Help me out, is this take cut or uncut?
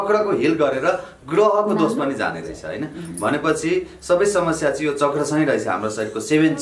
uncut